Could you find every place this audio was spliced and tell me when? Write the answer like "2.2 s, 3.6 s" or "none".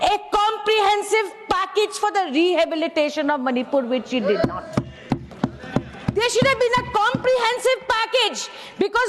none